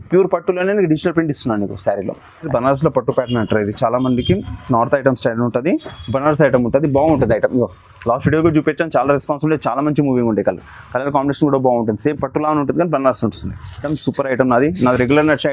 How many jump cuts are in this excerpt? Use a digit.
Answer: 2